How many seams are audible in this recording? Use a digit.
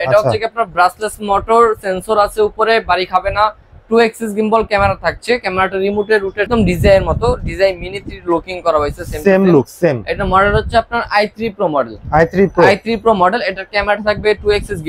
1